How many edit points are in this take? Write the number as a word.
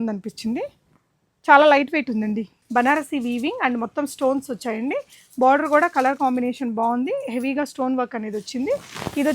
one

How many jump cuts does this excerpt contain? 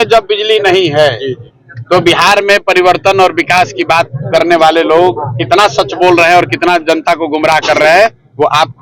zero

